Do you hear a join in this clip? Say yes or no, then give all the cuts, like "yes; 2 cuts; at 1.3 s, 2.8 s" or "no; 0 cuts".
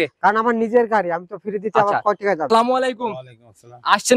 yes; 1 cut; at 2.5 s